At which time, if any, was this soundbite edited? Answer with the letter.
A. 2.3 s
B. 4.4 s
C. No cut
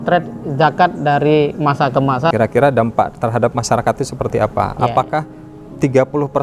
A